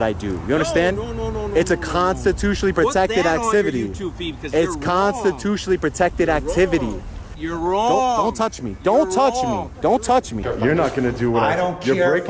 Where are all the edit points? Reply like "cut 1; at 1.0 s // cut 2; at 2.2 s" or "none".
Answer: cut 1; at 7.4 s // cut 2; at 10.4 s